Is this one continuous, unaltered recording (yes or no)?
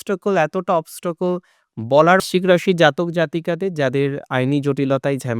no